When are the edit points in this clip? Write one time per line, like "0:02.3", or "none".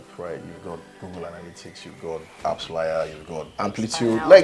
0:02.4
0:03.5